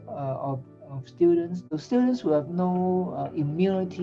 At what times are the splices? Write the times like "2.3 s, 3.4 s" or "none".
1.6 s